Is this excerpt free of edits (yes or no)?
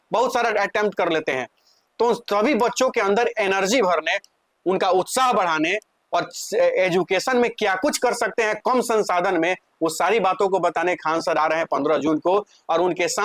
yes